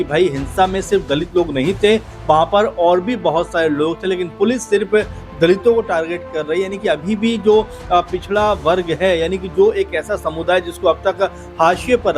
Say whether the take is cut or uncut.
uncut